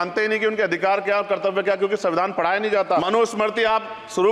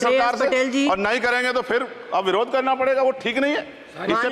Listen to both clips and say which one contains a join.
first; 1 cut; at 3.1 s

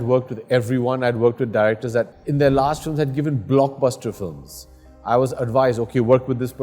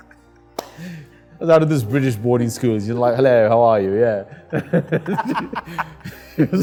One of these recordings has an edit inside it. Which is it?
first; 1 cut; at 2.2 s

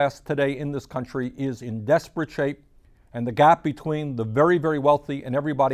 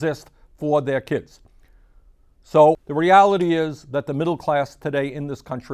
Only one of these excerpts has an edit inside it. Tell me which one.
second; 1 cut; at 2.8 s

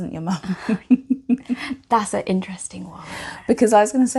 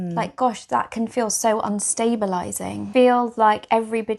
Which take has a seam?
second; 1 cut; at 2.9 s

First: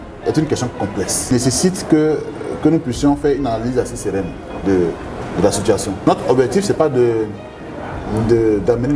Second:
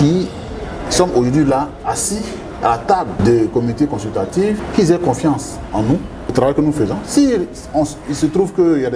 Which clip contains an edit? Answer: first; 2 cuts; at 1.3 s, 6.1 s

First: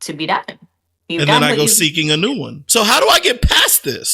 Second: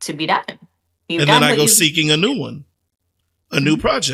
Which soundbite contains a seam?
first; 1 cut; at 2.5 s

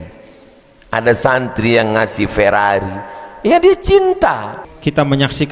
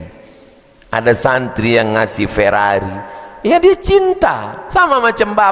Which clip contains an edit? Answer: first; 1 cut; at 4.5 s

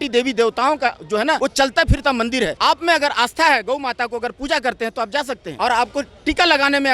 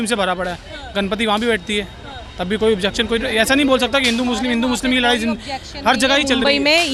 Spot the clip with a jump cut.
first; 3 cuts; at 1.4 s, 2.5 s, 5.5 s

